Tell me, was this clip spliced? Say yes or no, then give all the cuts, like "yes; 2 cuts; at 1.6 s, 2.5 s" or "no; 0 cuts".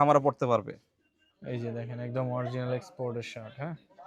no; 0 cuts